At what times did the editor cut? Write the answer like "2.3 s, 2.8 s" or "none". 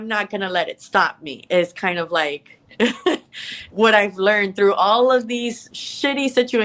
5.6 s